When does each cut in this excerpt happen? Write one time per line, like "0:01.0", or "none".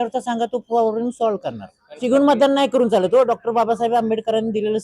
0:02.0

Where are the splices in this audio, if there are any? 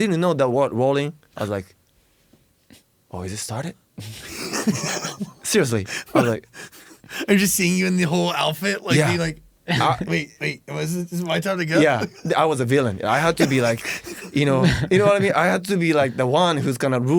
none

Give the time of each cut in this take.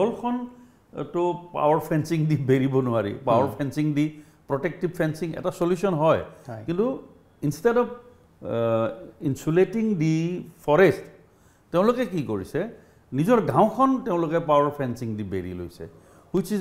none

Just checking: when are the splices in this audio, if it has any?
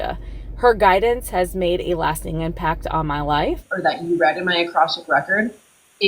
0:03.7

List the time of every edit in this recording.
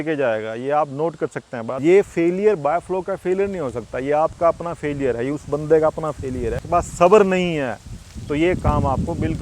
0:01.7
0:06.6

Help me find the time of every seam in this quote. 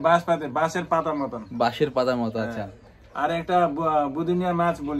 none

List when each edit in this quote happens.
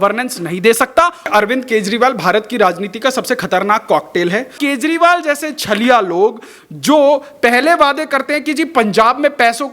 0:01.3
0:04.5

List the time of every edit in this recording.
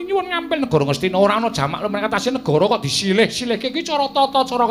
0:02.2

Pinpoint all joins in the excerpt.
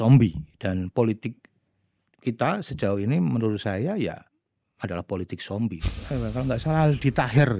0:05.8

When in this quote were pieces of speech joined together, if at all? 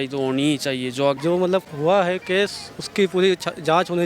0:01.2

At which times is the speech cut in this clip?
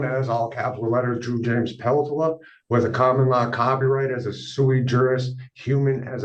none

